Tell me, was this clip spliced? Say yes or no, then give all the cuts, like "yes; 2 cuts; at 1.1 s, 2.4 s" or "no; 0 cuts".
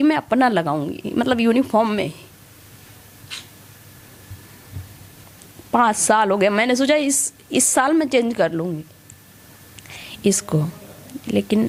no; 0 cuts